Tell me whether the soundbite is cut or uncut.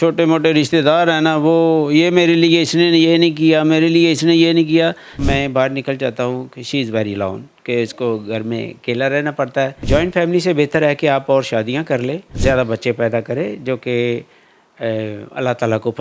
cut